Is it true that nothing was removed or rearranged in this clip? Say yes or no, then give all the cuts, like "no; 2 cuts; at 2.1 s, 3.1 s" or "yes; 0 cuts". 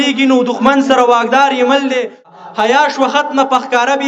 no; 1 cut; at 2.3 s